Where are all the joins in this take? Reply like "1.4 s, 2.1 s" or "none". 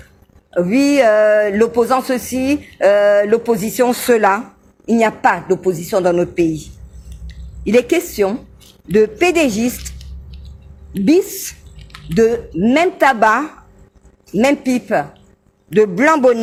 none